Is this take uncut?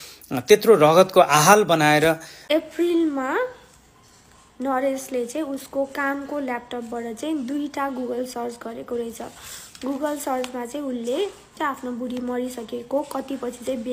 no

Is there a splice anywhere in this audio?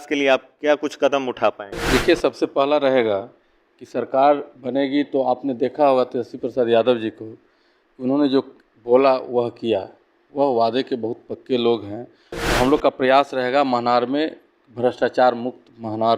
yes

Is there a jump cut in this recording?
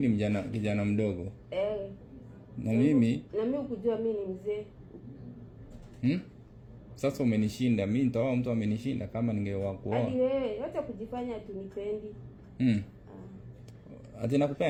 no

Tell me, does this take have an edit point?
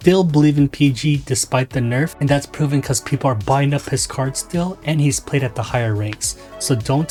no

